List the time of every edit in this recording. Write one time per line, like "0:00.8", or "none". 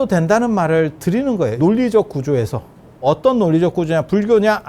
0:01.6
0:03.0